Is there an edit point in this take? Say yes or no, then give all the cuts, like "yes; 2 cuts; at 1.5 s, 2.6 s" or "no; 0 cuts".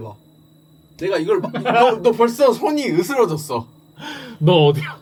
no; 0 cuts